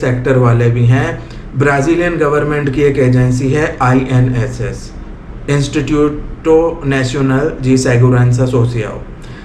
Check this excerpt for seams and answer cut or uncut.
uncut